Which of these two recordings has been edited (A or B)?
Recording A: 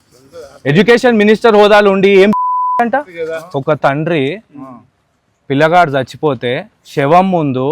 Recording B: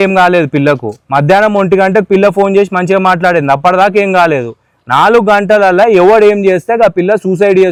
A